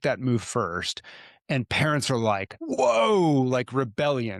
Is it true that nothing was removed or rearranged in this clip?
yes; 0 cuts

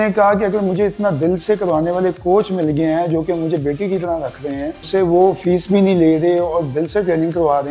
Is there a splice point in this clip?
yes; 1 cut; at 4.9 s

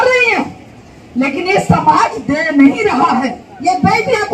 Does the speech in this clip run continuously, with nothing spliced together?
no; 1 cut; at 3.5 s

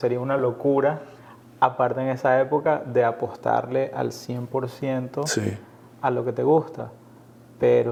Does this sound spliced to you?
no; 0 cuts

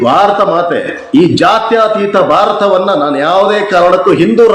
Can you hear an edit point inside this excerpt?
no; 0 cuts

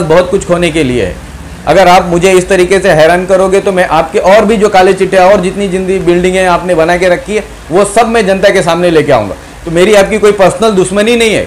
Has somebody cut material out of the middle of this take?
no; 0 cuts

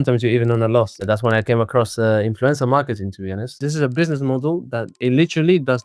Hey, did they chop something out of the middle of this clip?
yes; 3 cuts; at 1.0 s, 3.6 s, 4.9 s

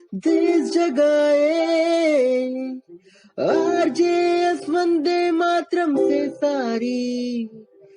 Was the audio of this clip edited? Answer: yes; 1 cut; at 2.6 s

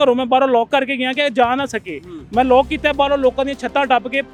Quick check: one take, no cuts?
yes; 0 cuts

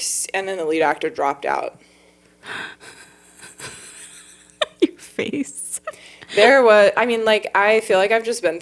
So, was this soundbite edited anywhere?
no; 0 cuts

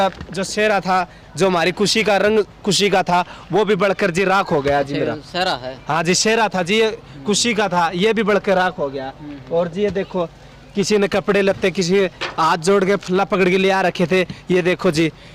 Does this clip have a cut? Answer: no; 0 cuts

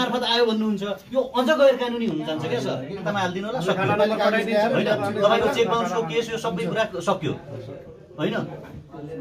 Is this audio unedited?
no; 1 cut; at 3.0 s

